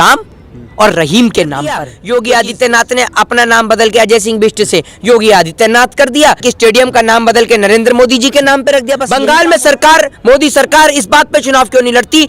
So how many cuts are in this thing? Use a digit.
3